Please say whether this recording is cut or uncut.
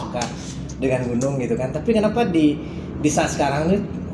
uncut